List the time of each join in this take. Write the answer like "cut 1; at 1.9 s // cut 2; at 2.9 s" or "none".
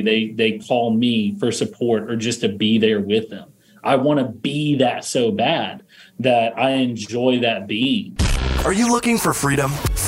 cut 1; at 8.2 s